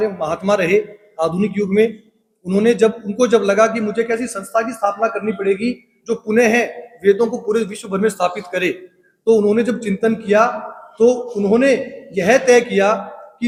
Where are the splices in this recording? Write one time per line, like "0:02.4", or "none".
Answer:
none